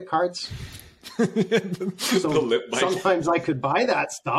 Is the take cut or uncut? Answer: uncut